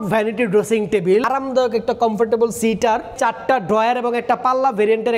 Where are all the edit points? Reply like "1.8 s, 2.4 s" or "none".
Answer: 1.2 s, 3.1 s